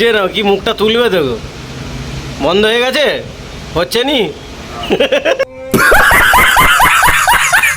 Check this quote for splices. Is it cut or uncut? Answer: cut